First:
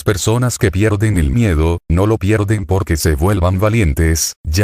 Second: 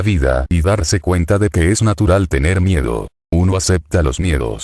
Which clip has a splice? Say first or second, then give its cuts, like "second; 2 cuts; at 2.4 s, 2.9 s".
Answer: second; 1 cut; at 3.1 s